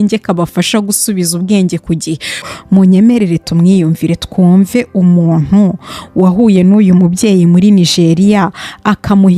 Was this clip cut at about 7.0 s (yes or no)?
no